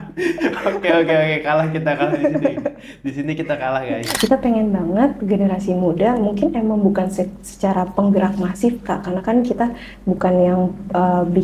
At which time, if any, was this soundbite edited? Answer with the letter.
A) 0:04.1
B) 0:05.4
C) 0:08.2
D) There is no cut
A